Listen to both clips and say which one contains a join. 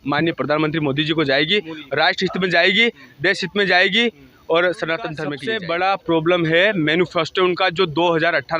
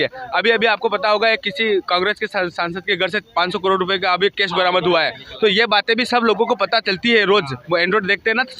first; 1 cut; at 5.3 s

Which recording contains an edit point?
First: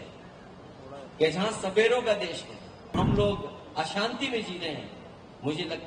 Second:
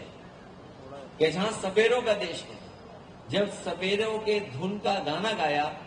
first; 1 cut; at 2.9 s

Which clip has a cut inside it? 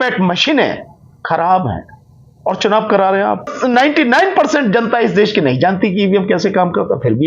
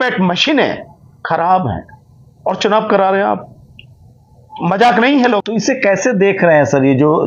first; 1 cut; at 3.5 s

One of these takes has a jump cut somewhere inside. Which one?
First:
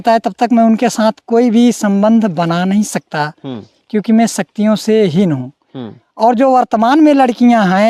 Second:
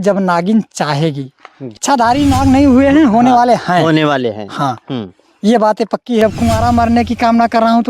second; 2 cuts; at 1.8 s, 6.2 s

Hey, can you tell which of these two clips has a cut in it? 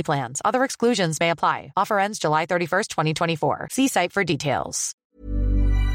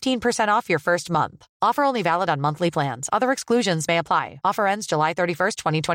first; 1 cut; at 5.0 s

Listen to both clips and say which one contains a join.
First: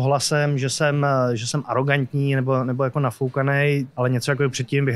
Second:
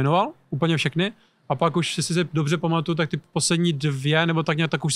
first; 1 cut; at 3.9 s

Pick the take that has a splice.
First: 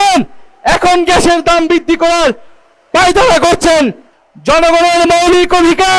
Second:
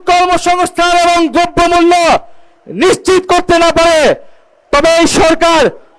first; 1 cut; at 4.1 s

